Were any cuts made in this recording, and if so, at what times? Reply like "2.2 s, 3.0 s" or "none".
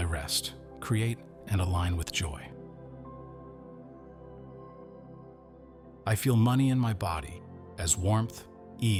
none